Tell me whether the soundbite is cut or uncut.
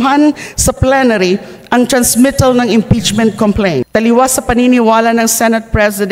cut